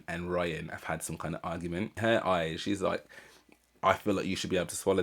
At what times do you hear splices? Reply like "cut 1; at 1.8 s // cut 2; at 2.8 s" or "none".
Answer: cut 1; at 1.9 s